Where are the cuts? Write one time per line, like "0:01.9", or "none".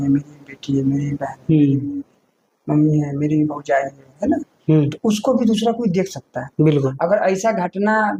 none